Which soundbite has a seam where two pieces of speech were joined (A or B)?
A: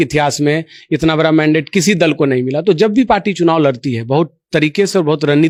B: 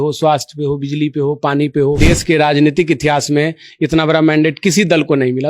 B